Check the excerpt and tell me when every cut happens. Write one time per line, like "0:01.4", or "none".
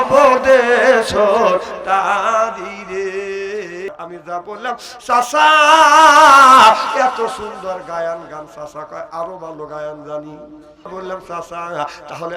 0:03.9
0:10.9